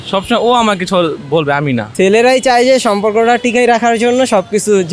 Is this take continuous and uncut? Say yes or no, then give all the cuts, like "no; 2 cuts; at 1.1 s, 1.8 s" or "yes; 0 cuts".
no; 1 cut; at 1.9 s